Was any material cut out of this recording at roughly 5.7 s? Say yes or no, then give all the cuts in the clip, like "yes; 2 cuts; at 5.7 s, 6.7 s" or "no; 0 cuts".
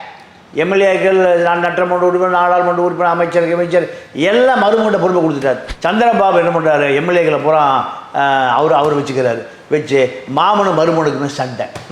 yes; 1 cut; at 5.7 s